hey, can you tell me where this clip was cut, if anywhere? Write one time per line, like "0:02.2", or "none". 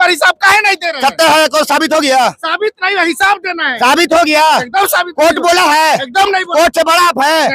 none